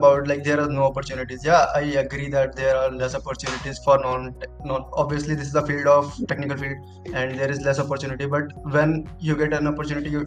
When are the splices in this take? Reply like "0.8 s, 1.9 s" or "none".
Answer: none